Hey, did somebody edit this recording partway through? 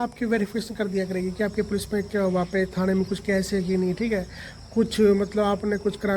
no; 0 cuts

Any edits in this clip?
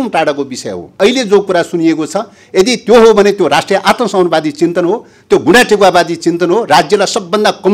yes; 1 cut; at 1.0 s

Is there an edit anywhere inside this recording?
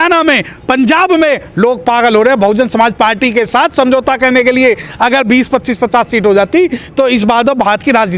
no; 0 cuts

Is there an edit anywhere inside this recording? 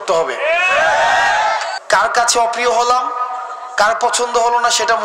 yes; 1 cut; at 1.7 s

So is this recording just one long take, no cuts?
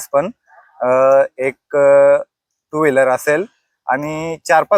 yes; 0 cuts

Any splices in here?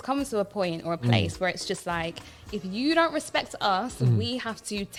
no; 0 cuts

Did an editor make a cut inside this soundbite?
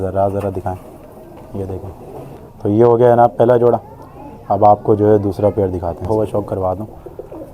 yes; 2 cuts; at 2.3 s, 6.1 s

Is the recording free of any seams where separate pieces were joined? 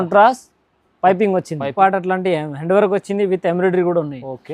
no; 1 cut; at 1.7 s

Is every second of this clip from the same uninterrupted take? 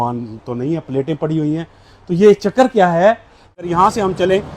no; 1 cut; at 3.5 s

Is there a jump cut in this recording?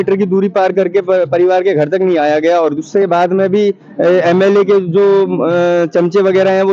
no; 0 cuts

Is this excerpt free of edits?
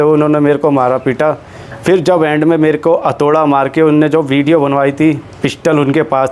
yes; 0 cuts

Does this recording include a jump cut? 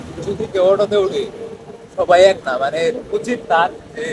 no; 0 cuts

